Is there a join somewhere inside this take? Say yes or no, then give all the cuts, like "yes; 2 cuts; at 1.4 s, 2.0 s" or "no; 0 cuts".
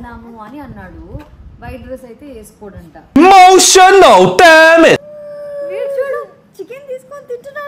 yes; 1 cut; at 5.2 s